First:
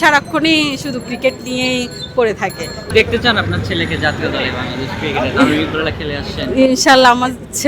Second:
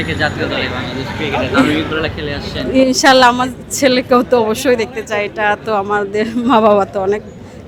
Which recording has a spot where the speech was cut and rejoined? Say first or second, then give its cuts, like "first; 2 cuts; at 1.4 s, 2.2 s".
first; 1 cut; at 2.8 s